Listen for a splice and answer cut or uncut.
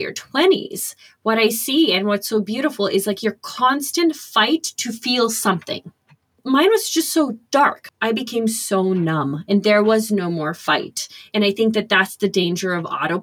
cut